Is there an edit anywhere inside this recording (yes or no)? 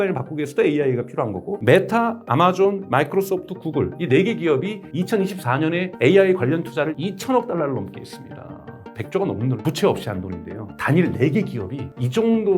yes